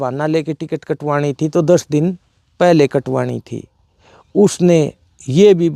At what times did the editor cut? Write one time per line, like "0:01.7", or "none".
none